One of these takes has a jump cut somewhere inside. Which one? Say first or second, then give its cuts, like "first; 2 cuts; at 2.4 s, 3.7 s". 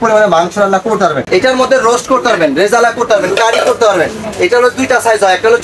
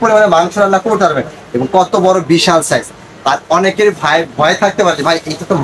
first; 1 cut; at 1.2 s